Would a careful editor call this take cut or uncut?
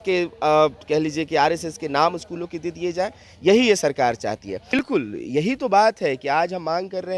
cut